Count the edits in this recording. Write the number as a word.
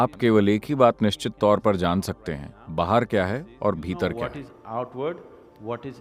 zero